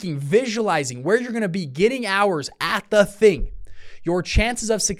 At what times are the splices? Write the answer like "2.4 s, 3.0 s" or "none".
none